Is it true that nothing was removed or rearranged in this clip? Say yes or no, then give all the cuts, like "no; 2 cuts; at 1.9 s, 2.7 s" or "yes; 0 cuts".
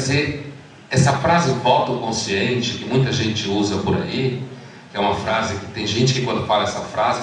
yes; 0 cuts